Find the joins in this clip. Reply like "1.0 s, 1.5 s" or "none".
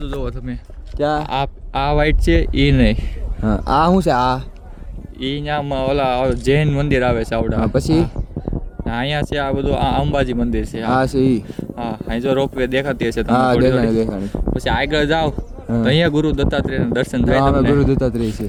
none